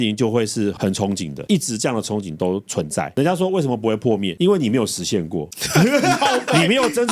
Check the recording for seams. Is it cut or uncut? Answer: cut